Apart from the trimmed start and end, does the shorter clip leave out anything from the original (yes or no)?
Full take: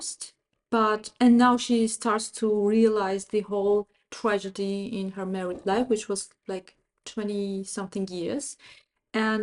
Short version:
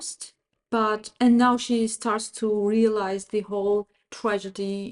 no